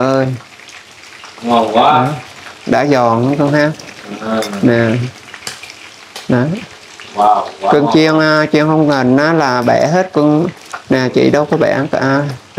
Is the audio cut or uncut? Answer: uncut